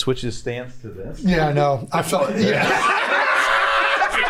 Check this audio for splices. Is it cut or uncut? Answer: uncut